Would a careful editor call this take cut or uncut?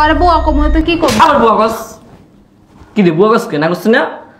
uncut